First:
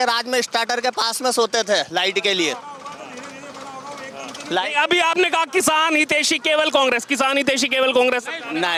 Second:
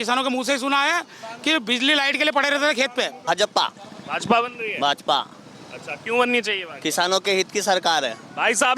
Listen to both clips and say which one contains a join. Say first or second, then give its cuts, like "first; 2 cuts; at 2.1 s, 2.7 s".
second; 1 cut; at 3.3 s